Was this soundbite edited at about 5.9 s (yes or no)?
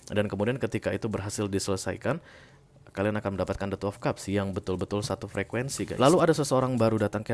yes